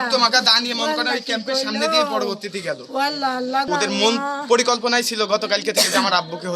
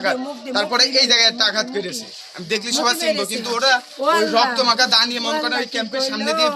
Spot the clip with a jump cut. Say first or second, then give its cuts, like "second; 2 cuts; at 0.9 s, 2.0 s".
first; 1 cut; at 3.7 s